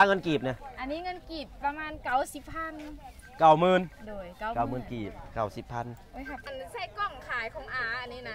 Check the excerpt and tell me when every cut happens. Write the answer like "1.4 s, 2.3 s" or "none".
6.4 s